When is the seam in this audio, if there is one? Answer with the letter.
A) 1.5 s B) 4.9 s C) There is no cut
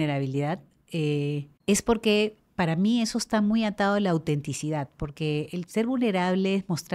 A